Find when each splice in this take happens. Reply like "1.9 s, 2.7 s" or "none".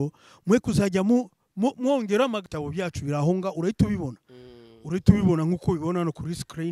2.5 s